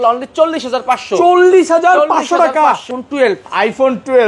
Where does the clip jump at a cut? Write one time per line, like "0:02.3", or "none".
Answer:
0:03.0

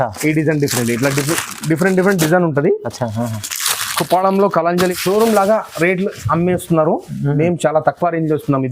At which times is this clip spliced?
0:04.9

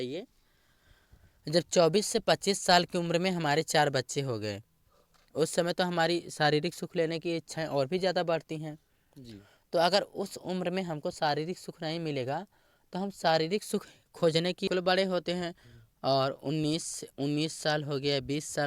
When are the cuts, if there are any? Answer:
0:14.7

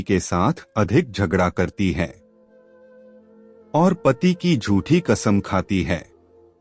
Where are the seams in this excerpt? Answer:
0:02.2
0:03.7

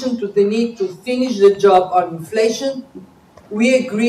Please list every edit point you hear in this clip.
none

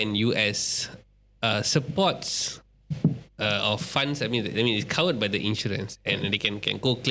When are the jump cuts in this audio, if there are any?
none

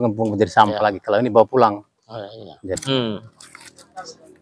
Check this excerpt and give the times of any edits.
0:02.8

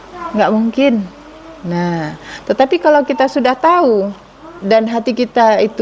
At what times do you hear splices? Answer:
0:04.6

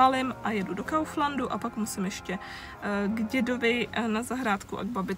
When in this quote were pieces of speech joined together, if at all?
none

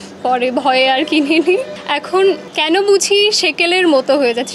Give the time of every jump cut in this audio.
none

